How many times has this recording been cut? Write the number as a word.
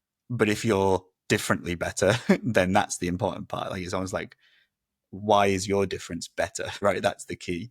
one